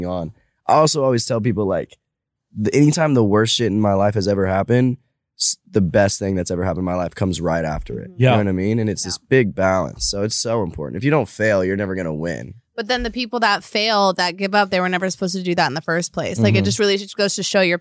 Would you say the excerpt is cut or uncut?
uncut